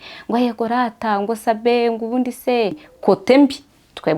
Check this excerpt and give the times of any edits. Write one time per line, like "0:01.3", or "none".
0:02.9

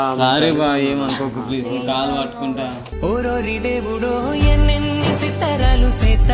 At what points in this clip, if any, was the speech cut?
none

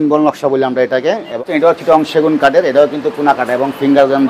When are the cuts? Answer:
0:01.4

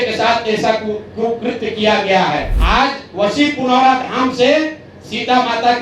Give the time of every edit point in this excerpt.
0:02.5

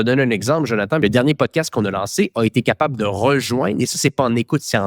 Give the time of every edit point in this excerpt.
0:01.0

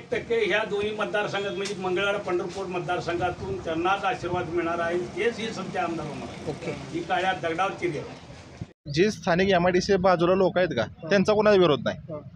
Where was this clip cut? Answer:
0:08.9

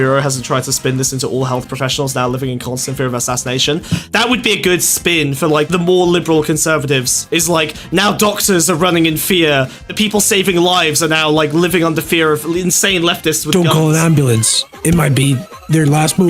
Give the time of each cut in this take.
0:04.1
0:05.7
0:07.3
0:09.8

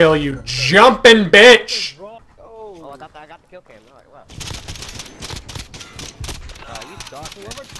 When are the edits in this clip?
0:02.3

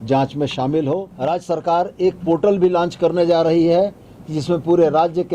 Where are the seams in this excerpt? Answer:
0:01.1

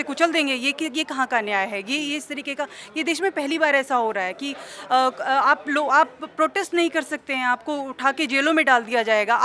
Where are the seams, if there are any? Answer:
none

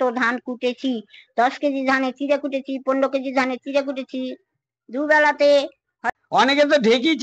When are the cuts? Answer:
0:06.1

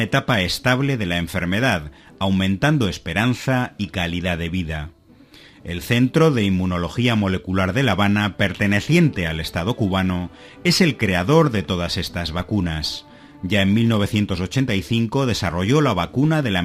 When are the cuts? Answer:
0:09.6

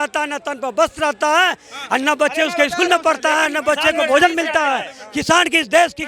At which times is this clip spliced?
none

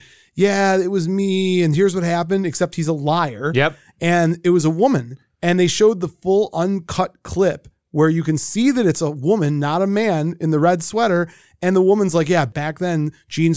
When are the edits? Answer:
none

